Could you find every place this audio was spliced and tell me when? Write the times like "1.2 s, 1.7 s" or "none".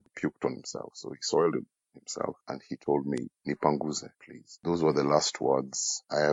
none